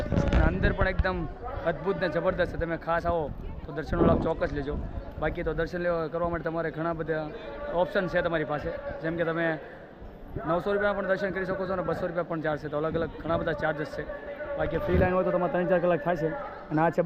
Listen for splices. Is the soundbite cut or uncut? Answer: uncut